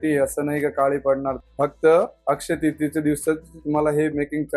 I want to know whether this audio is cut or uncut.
cut